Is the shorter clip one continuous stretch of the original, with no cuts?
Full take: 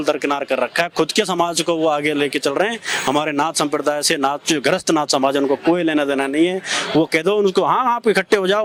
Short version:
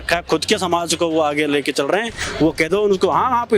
no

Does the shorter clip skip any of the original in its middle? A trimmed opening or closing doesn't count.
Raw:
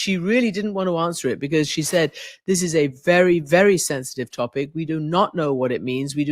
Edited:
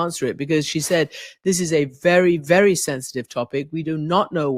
no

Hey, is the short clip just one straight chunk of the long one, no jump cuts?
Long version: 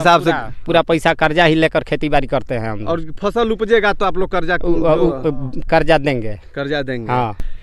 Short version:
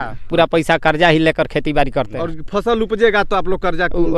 no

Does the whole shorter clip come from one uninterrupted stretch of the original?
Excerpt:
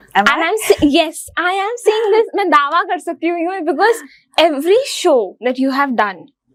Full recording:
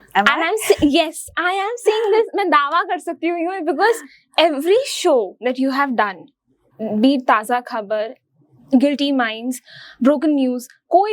yes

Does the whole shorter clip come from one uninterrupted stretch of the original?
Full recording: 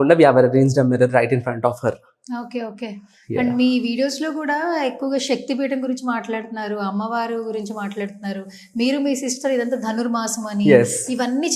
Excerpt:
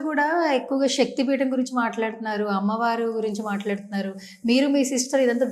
yes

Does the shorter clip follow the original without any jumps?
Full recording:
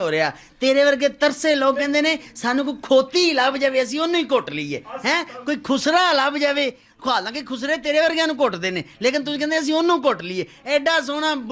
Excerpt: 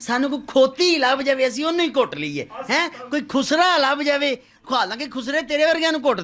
yes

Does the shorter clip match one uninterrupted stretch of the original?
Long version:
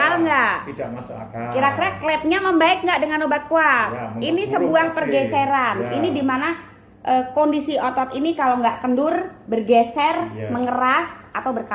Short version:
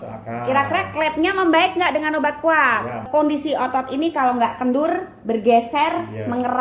no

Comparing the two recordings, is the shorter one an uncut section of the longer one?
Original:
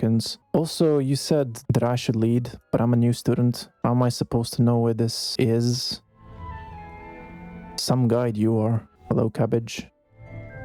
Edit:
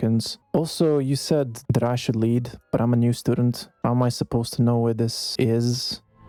yes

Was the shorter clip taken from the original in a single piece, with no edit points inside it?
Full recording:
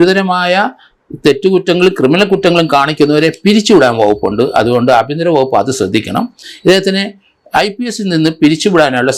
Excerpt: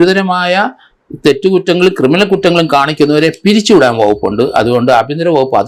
yes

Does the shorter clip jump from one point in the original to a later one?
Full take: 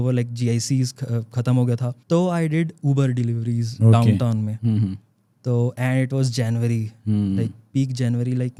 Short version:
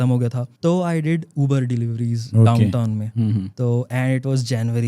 yes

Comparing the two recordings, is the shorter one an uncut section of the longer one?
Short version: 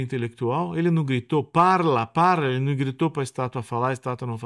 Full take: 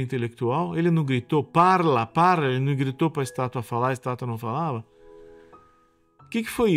yes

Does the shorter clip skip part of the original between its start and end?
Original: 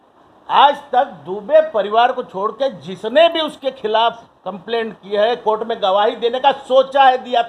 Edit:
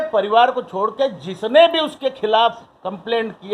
no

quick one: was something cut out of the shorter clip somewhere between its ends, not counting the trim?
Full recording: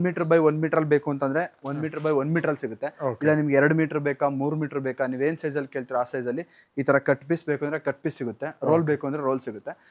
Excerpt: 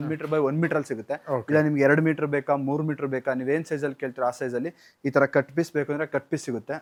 no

